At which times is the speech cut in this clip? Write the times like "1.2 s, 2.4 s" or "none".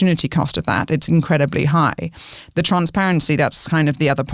none